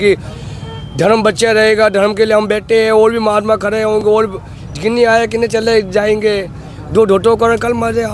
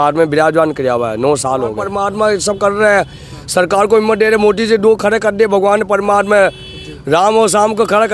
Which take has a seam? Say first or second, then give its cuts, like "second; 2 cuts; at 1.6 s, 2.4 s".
second; 1 cut; at 1.9 s